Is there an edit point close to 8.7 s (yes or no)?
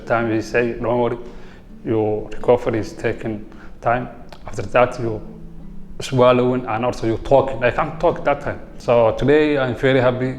yes